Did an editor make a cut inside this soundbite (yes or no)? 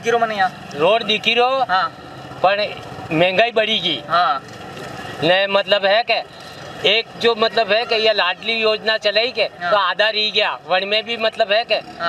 no